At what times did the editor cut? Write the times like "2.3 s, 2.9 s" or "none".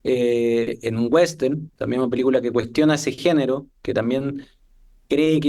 1.7 s